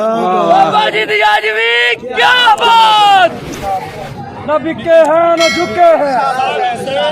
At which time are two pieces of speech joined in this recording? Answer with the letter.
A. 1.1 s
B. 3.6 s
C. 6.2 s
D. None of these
B